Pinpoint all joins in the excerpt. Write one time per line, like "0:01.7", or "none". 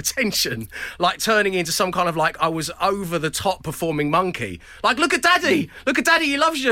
none